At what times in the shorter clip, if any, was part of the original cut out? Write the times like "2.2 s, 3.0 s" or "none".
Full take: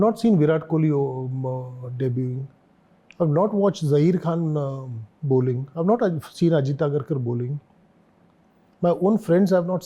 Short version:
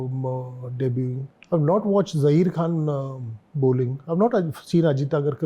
1.3 s